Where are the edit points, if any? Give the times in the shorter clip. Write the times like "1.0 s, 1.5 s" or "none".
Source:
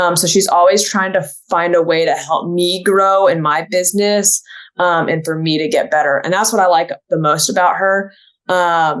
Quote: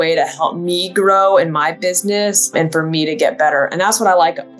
2.5 s